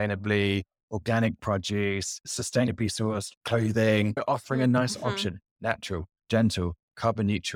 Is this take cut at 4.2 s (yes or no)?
yes